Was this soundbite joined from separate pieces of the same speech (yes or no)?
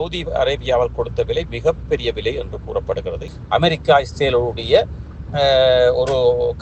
yes